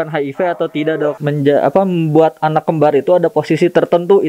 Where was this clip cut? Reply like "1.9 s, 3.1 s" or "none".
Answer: 1.2 s